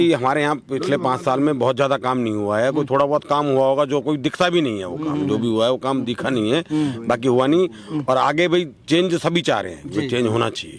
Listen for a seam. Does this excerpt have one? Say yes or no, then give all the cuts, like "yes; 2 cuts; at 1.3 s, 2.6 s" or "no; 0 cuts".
no; 0 cuts